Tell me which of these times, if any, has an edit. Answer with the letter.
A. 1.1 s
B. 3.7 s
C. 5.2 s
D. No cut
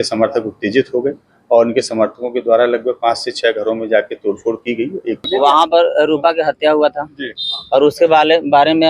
C